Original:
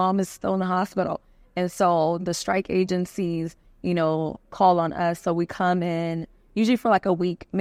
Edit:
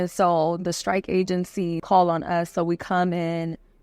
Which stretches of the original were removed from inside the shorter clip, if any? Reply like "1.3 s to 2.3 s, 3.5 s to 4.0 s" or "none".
3.4 s to 4.5 s